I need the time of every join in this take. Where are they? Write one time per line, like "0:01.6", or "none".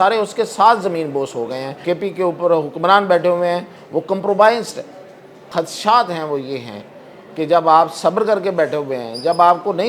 0:01.8
0:05.4